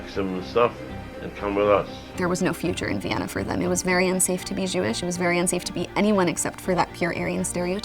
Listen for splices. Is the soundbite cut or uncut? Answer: cut